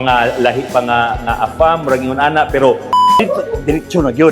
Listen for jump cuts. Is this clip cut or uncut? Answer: cut